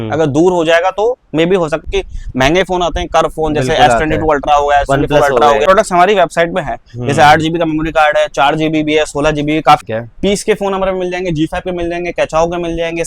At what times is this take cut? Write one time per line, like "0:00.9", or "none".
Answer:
0:01.8
0:05.6
0:09.8